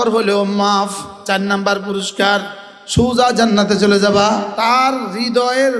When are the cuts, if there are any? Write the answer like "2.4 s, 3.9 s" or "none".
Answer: 1.2 s, 4.5 s